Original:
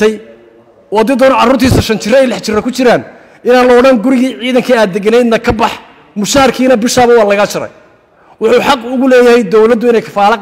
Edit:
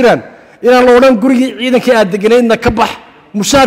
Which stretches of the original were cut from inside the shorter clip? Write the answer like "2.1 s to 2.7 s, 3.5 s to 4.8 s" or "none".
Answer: none

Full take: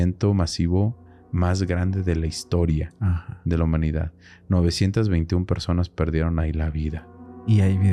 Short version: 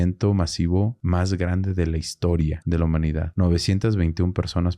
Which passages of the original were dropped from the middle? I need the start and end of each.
1.0 s to 1.3 s, 3.3 s to 4.1 s

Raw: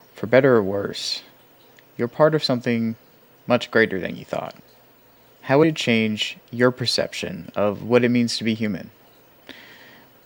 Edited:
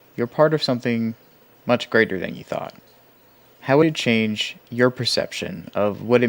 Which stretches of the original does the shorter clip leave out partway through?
none

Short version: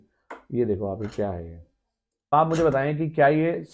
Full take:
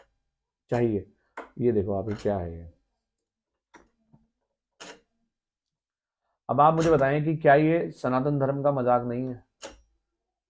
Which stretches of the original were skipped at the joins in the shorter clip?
3.4 s to 6.6 s

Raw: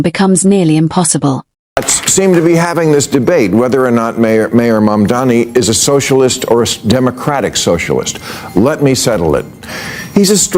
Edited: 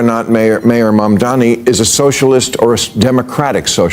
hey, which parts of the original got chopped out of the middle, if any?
none

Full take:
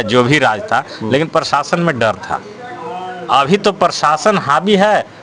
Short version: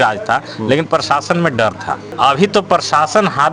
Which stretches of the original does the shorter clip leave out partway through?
2.5 s to 3.2 s

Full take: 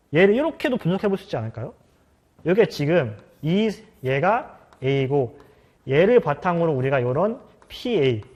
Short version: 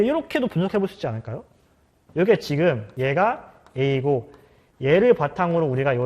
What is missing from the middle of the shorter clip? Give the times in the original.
3.2 s to 3.9 s

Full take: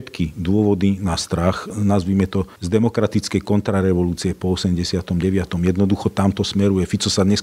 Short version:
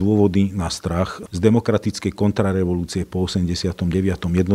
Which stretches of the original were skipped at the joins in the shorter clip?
1.7 s to 2.5 s

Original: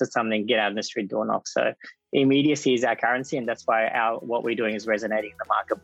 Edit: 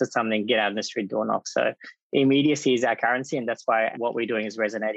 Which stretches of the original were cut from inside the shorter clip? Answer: 3.9 s to 4.2 s

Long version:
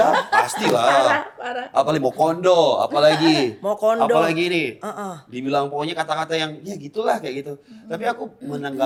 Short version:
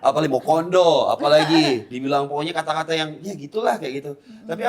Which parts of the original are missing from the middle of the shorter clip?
3.6 s to 5.3 s

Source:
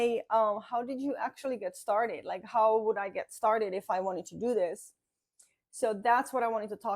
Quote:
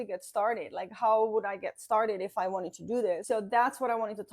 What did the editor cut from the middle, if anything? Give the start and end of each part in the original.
4.7 s to 5.7 s

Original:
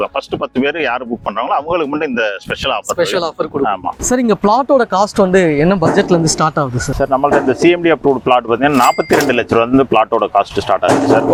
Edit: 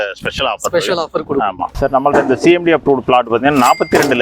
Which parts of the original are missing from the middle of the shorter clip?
4.0 s to 6.9 s

